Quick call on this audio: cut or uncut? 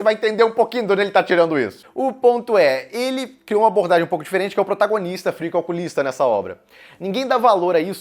uncut